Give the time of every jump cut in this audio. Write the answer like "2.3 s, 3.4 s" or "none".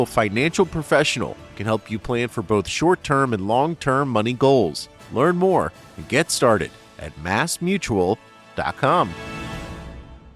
9.1 s